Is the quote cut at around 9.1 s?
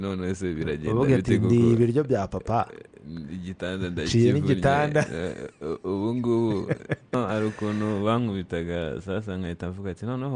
no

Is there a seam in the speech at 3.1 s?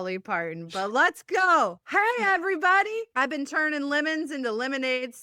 yes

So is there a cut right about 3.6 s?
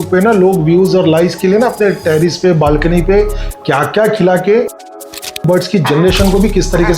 no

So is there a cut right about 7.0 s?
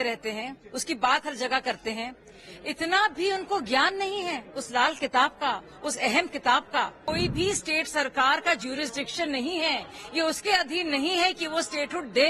yes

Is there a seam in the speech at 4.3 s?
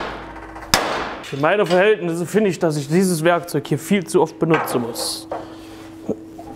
no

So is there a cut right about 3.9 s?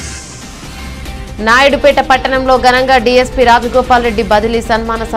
no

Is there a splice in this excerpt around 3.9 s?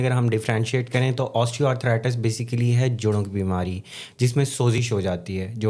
no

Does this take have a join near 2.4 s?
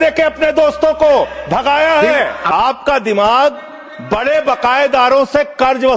no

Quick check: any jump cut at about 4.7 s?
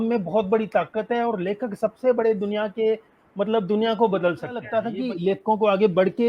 yes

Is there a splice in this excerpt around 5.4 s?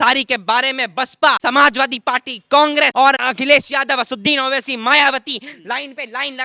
no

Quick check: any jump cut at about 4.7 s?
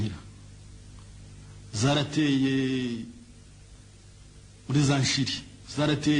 no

